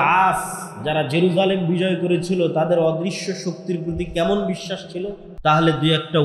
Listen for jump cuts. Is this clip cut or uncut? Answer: cut